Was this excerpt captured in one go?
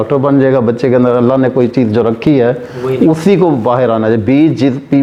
yes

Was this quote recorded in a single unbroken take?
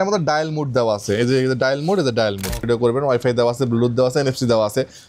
no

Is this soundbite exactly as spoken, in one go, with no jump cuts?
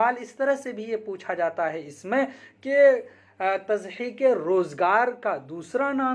yes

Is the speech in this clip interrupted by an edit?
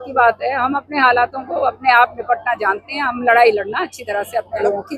no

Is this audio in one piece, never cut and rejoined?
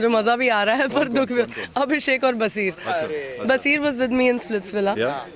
yes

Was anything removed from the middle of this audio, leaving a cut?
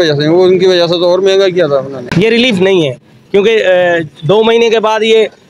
yes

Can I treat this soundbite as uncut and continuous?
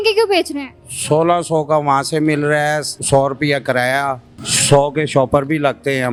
yes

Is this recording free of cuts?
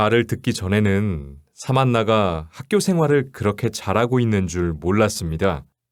yes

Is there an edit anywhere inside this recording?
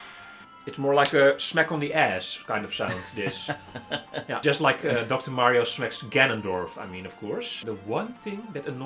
yes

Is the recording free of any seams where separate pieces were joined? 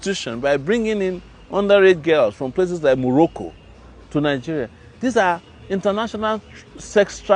yes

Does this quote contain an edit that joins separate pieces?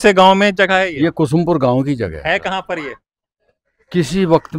no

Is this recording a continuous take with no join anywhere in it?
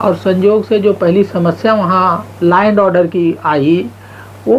yes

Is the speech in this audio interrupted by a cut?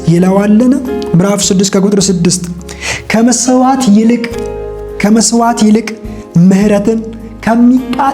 yes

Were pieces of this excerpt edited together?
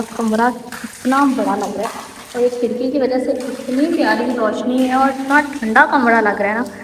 no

